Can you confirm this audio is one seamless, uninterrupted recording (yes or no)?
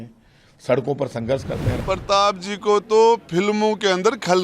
no